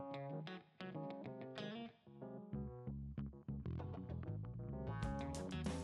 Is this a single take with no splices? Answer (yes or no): yes